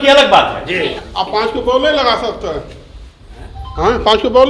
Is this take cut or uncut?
cut